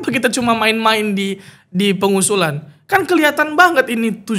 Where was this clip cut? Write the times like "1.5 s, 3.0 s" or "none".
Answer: none